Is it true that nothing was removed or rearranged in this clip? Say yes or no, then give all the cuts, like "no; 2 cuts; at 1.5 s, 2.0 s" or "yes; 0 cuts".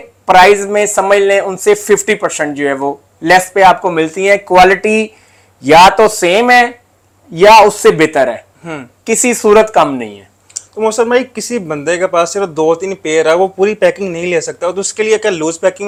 yes; 0 cuts